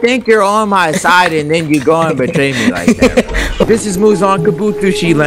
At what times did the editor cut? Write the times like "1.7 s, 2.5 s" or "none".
3.7 s